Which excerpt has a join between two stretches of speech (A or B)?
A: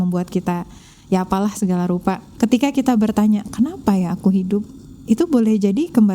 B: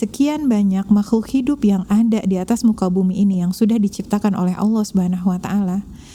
A